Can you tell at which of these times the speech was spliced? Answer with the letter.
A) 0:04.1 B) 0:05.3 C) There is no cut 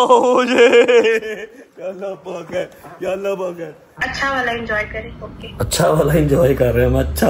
A